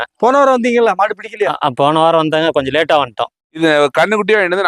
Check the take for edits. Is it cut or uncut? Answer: cut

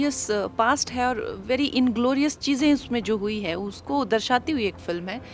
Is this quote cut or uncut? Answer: uncut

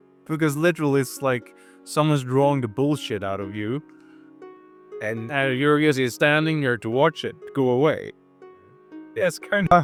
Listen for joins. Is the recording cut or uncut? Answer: uncut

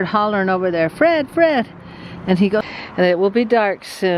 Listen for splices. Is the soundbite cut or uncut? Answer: cut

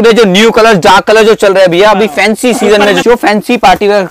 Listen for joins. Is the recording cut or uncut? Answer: cut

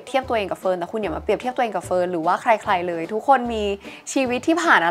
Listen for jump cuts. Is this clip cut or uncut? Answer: uncut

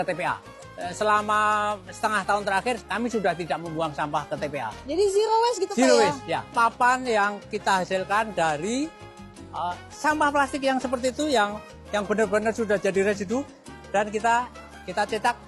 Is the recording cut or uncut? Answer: cut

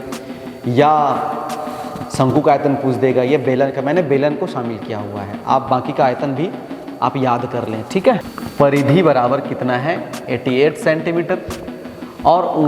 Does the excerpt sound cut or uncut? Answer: cut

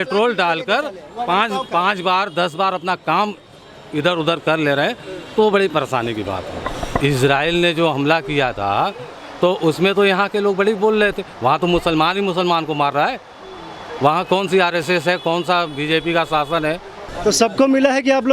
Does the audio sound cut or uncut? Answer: cut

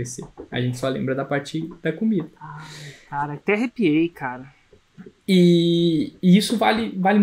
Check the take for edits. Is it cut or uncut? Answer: uncut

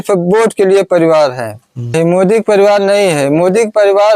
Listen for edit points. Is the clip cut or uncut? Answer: cut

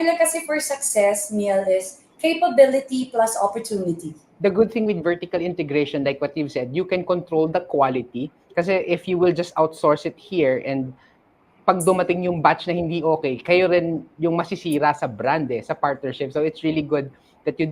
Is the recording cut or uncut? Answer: cut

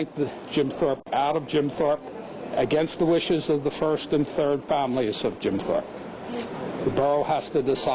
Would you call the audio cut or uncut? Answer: uncut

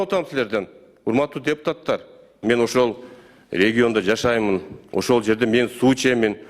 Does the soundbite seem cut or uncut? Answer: cut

